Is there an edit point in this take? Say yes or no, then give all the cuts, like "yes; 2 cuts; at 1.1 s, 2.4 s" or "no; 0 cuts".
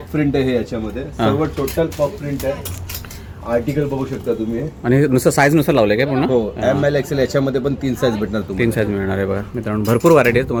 no; 0 cuts